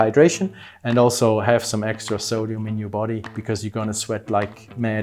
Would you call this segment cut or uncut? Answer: uncut